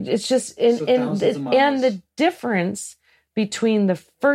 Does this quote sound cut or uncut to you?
uncut